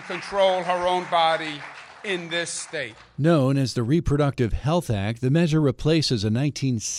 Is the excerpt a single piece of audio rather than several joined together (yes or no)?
yes